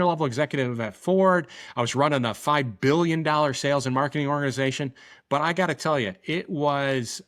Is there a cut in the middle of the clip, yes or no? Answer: no